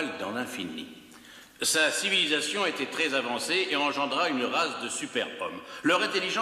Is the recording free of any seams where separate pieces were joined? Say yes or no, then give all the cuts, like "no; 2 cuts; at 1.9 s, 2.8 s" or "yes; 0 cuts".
yes; 0 cuts